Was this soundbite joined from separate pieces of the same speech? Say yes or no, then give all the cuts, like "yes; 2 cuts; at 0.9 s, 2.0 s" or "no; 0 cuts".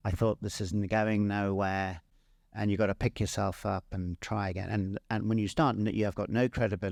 no; 0 cuts